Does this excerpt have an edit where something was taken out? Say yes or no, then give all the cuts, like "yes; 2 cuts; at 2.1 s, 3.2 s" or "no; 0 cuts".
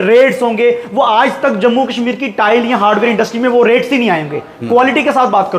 no; 0 cuts